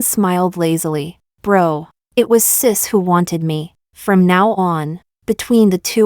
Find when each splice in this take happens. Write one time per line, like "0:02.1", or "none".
0:02.0